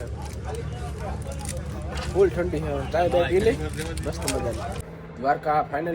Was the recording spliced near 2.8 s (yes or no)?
no